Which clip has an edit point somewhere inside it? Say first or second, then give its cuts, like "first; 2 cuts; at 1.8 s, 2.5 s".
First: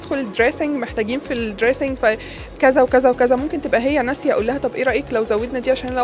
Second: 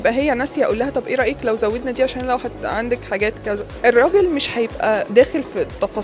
second; 2 cuts; at 3.7 s, 5.1 s